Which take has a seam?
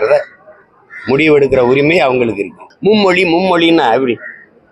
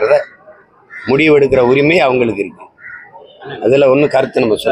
first; 1 cut; at 2.6 s

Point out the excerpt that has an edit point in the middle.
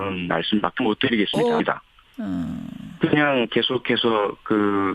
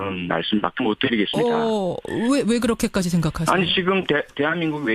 second; 1 cut; at 1.6 s

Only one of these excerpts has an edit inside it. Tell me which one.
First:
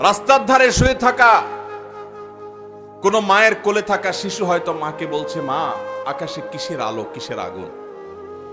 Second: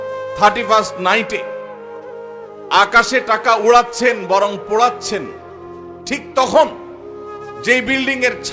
first; 1 cut; at 7.5 s

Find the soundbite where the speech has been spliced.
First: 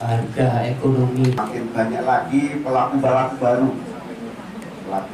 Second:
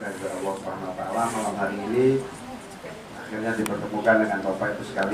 first; 1 cut; at 1.4 s

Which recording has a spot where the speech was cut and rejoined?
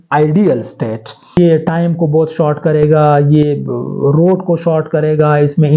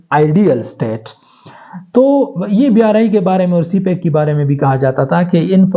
first; 1 cut; at 1.4 s

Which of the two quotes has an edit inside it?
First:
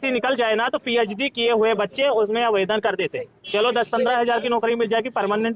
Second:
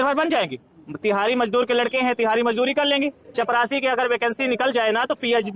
second; 1 cut; at 3.2 s

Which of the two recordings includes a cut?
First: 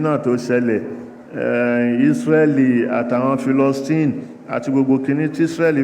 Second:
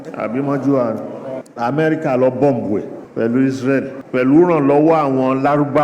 second; 3 cuts; at 1.4 s, 3.0 s, 4.0 s

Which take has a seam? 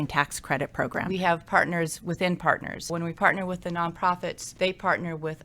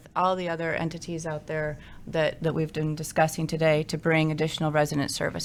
first; 3 cuts; at 1.1 s, 2.9 s, 4.4 s

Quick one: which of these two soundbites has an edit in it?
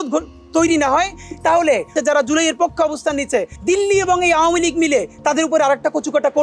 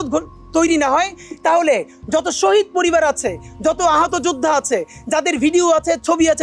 first; 2 cuts; at 2.0 s, 3.5 s

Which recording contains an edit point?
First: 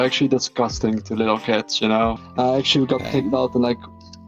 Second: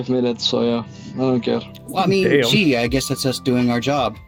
first; 1 cut; at 2.2 s

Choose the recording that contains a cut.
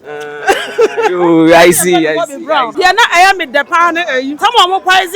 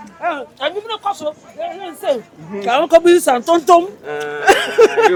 first; 2 cuts; at 2.7 s, 4.3 s

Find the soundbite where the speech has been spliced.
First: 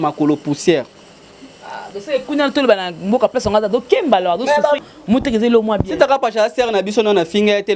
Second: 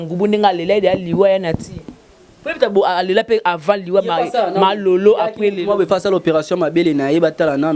first; 1 cut; at 4.8 s

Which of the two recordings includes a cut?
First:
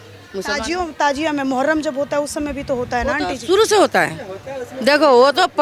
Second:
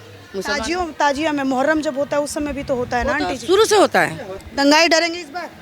second; 1 cut; at 4.4 s

